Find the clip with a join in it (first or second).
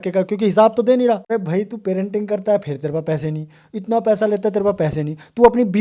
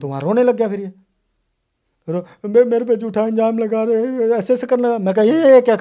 first